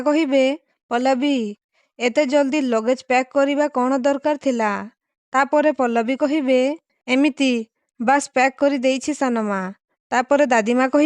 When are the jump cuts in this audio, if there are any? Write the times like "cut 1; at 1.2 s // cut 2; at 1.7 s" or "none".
cut 1; at 6.9 s